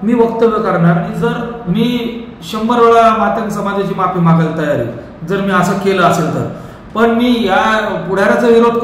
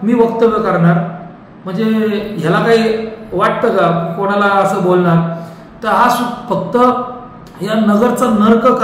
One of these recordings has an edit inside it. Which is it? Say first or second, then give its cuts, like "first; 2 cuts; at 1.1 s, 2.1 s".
first; 1 cut; at 1.1 s